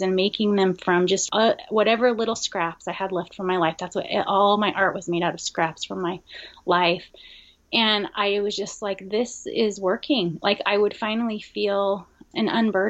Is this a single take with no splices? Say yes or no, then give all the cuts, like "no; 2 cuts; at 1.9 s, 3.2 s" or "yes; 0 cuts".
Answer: no; 1 cut; at 1.3 s